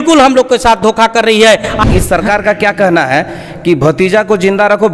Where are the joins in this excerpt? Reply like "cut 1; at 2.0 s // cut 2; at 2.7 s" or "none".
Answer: cut 1; at 1.8 s